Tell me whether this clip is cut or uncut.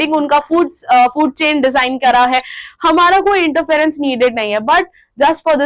uncut